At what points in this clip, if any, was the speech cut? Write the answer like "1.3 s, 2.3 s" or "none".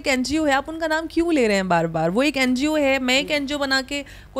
none